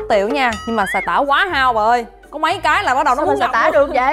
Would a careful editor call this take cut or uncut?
uncut